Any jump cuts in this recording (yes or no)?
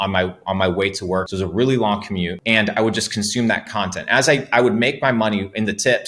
yes